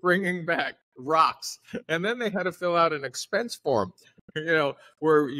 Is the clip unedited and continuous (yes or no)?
yes